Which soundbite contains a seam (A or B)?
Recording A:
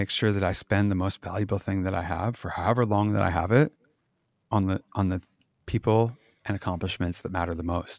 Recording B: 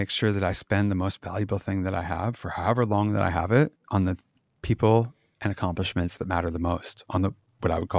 B